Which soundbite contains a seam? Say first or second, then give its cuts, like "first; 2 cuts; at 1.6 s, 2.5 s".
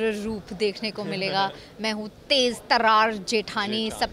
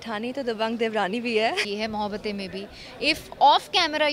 second; 1 cut; at 1.7 s